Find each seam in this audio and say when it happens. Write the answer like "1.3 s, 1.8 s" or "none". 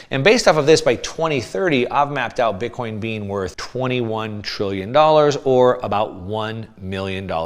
3.6 s